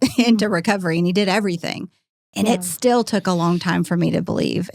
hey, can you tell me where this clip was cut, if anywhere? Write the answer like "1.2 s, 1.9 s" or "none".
none